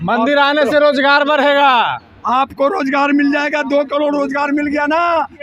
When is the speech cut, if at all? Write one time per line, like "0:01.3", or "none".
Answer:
none